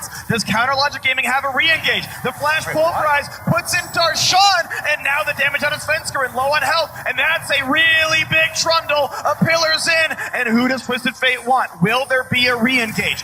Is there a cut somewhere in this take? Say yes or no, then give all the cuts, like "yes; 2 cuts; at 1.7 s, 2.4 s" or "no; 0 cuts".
no; 0 cuts